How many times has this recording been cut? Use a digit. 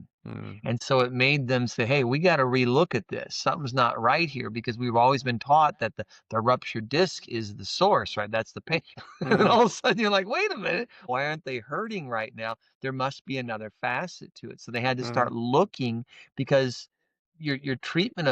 2